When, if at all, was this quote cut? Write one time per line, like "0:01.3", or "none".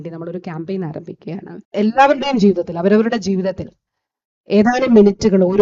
0:01.6